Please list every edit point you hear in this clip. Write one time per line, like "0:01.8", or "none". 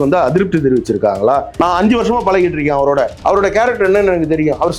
0:01.5
0:03.1